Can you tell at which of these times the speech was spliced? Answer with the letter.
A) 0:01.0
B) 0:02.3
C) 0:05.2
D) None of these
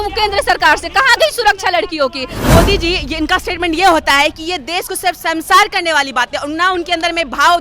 B